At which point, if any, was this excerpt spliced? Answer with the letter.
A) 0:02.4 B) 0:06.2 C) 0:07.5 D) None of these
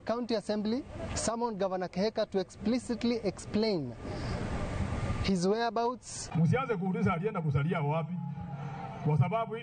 B